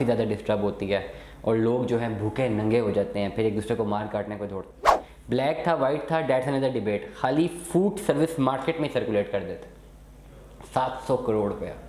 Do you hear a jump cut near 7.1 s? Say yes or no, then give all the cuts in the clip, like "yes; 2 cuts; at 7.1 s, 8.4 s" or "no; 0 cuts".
no; 1 cut; at 4.6 s